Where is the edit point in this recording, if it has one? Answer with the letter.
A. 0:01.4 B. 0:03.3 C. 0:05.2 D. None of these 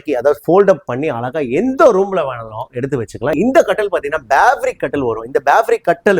B